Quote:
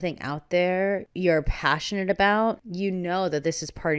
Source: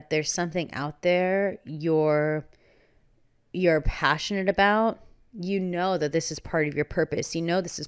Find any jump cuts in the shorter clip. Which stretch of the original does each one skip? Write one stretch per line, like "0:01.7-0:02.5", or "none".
0:01.6-0:03.5
0:05.1-0:05.4